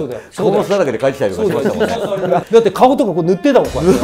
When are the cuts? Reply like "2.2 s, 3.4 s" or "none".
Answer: 2.0 s